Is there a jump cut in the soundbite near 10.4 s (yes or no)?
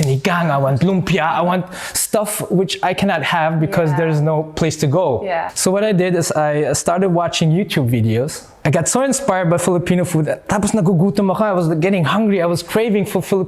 no